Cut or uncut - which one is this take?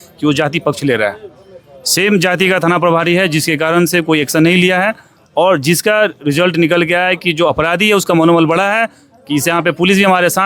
uncut